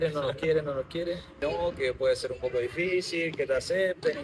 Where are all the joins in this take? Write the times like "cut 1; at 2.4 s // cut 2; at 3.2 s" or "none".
cut 1; at 1.4 s

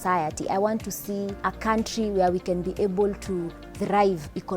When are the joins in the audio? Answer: cut 1; at 1.3 s

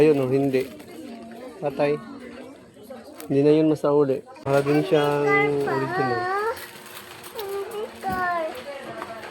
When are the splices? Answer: cut 1; at 4.3 s

